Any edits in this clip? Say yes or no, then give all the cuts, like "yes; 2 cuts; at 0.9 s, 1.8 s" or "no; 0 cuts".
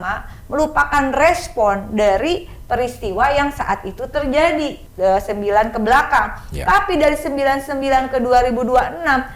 yes; 1 cut; at 4.8 s